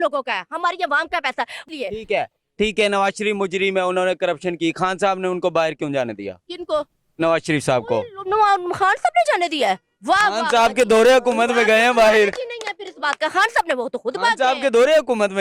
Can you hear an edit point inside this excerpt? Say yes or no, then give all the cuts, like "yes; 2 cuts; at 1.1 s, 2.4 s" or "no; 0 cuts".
yes; 1 cut; at 1.7 s